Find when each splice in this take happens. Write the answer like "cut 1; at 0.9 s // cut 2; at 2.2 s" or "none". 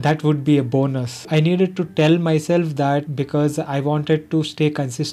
cut 1; at 1.3 s // cut 2; at 3.1 s